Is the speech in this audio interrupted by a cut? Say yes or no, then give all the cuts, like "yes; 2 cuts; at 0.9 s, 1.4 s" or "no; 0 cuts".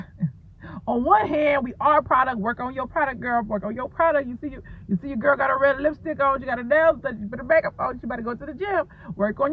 no; 0 cuts